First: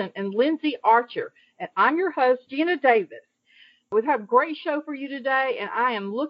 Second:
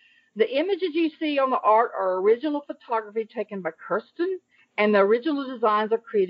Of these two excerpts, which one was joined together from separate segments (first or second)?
first